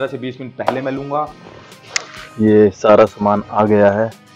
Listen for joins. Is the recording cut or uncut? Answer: cut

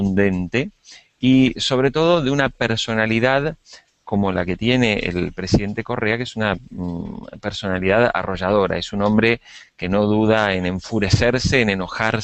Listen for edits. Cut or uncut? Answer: uncut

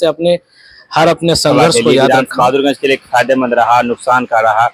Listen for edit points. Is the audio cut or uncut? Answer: cut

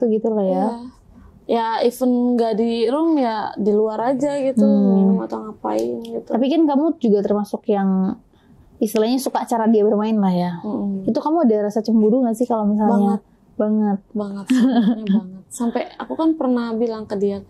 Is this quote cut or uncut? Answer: uncut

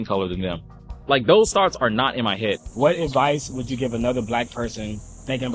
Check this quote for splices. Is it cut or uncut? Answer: cut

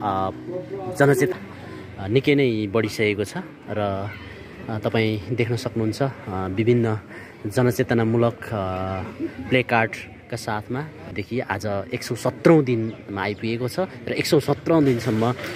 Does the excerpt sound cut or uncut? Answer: cut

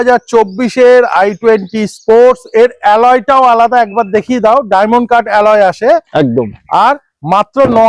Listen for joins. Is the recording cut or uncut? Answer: uncut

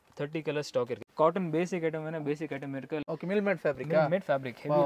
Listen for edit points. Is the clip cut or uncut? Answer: cut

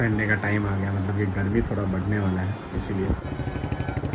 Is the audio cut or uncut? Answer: cut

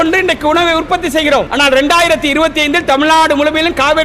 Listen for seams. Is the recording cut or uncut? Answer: cut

